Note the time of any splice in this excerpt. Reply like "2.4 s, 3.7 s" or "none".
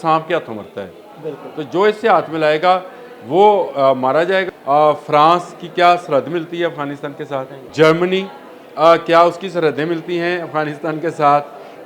4.5 s, 7.6 s